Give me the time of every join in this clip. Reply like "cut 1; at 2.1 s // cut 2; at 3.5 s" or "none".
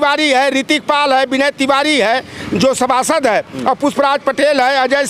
none

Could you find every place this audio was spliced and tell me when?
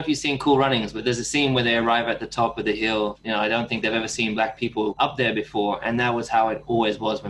cut 1; at 0.9 s // cut 2; at 3.2 s // cut 3; at 5.0 s

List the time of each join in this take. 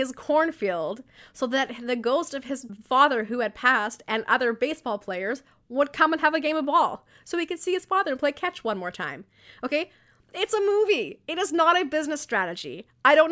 none

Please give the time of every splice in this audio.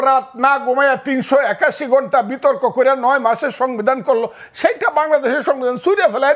none

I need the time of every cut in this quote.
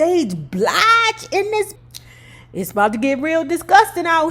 cut 1; at 1.7 s

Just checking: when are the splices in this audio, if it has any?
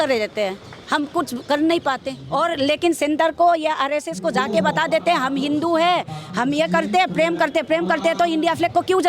cut 1; at 2.1 s

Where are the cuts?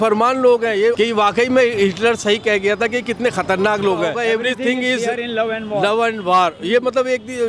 cut 1; at 0.9 s // cut 2; at 4.2 s

